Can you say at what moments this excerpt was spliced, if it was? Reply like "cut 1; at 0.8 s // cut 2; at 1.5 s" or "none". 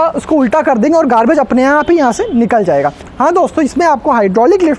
cut 1; at 3.0 s